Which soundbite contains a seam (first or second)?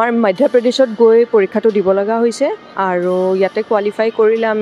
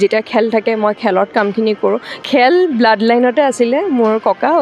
second